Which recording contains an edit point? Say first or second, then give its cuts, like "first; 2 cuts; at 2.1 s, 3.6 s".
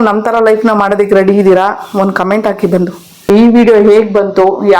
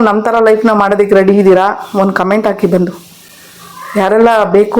first; 1 cut; at 3.3 s